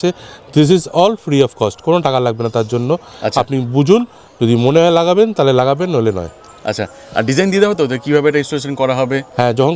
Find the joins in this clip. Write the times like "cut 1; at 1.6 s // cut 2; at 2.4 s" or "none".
none